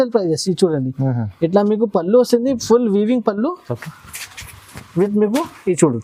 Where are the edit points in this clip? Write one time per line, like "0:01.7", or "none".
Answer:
none